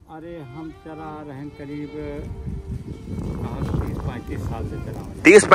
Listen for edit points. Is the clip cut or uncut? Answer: uncut